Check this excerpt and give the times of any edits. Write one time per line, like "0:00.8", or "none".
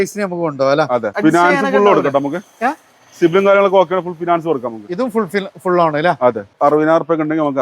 0:01.1
0:06.5